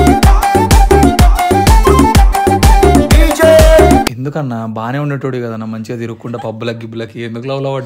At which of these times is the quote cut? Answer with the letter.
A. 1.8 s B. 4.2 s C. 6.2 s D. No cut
B